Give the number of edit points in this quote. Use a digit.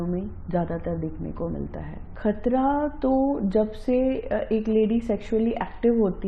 1